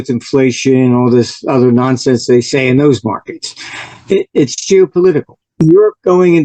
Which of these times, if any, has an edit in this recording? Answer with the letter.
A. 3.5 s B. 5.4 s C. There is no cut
B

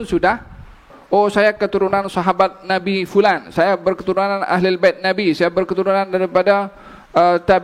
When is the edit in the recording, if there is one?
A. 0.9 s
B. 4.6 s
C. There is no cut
A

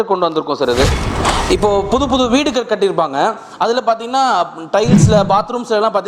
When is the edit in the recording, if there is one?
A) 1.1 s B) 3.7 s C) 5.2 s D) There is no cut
A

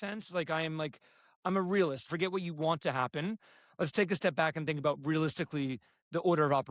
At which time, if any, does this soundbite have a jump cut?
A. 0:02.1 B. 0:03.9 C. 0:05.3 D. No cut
A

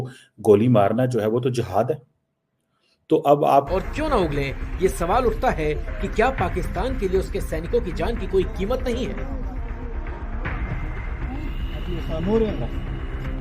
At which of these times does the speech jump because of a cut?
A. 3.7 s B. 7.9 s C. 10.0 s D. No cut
A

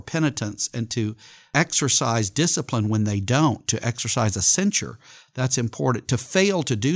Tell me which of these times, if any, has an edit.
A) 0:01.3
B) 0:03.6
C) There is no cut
A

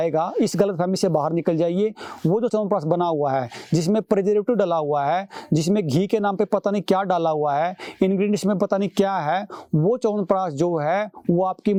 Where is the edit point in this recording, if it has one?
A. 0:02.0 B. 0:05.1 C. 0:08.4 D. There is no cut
D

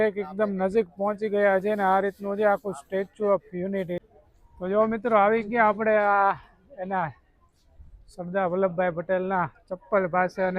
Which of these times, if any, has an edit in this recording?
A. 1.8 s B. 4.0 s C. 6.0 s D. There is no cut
B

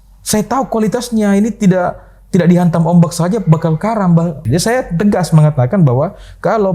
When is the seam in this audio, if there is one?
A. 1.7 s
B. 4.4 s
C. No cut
B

